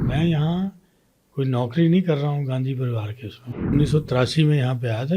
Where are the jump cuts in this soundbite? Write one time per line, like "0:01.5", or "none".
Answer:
0:03.7